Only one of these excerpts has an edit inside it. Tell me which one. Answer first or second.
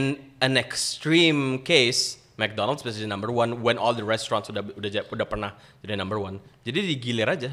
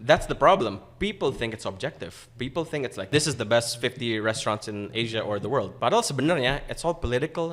second